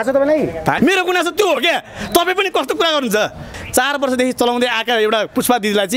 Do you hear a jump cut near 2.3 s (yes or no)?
no